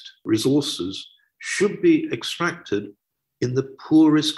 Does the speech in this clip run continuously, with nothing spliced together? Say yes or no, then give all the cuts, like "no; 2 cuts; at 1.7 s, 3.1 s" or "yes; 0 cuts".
yes; 0 cuts